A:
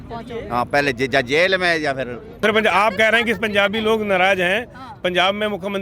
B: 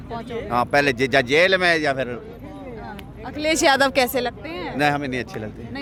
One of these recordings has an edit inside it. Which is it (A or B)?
A